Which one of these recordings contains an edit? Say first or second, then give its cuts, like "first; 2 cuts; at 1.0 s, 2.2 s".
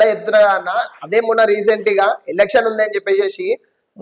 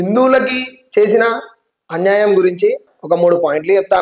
second; 1 cut; at 2.8 s